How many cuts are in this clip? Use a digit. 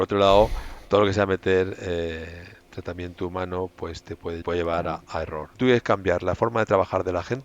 2